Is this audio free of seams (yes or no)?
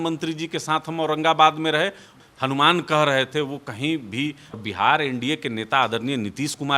no